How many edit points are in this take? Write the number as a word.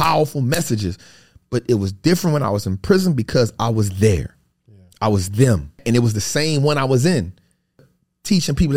two